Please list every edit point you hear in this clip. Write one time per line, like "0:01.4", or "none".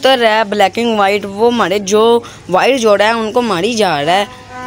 none